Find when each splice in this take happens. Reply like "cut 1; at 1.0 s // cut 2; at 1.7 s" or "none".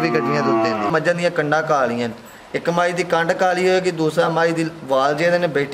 cut 1; at 0.9 s